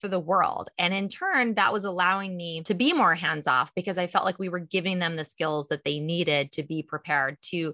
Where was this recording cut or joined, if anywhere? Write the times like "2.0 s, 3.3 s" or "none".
2.5 s